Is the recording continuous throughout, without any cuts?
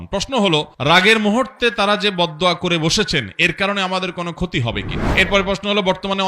no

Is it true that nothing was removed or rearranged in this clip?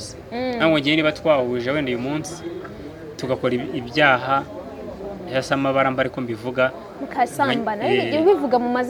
yes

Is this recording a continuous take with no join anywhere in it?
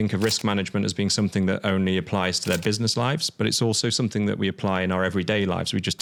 yes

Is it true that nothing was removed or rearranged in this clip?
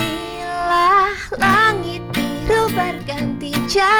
yes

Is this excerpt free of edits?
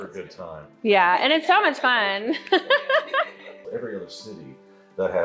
no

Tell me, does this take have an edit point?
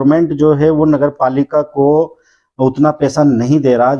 no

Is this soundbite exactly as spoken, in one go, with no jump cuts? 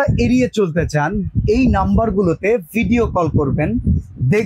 yes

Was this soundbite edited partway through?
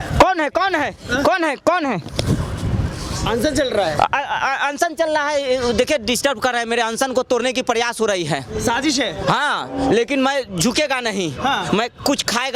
no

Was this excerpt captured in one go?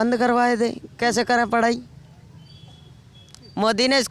yes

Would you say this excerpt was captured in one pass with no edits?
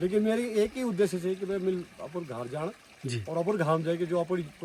yes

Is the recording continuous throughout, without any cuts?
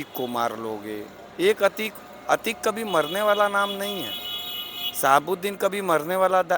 yes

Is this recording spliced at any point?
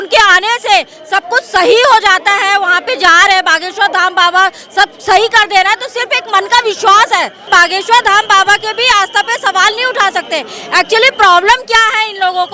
yes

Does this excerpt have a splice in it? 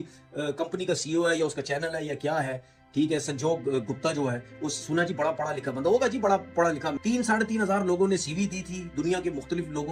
no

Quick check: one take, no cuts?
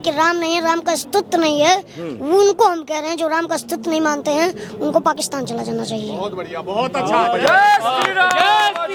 yes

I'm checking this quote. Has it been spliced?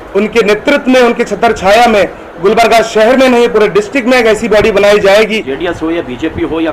yes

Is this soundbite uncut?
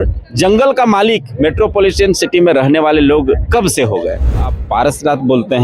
no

